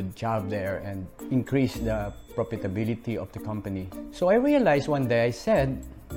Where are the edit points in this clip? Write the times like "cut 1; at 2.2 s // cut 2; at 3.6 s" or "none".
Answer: cut 1; at 1.1 s // cut 2; at 2.2 s // cut 3; at 3.9 s